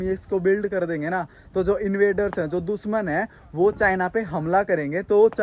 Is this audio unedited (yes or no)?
yes